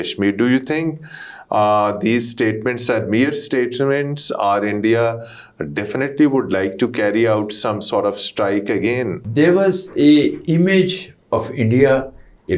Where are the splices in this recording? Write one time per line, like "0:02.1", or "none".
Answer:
0:09.2